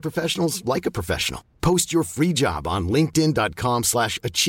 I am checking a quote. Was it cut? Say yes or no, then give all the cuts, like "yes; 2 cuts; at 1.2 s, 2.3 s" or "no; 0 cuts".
no; 0 cuts